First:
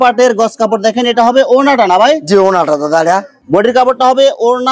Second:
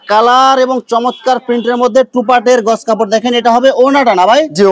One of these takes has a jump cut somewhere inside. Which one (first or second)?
first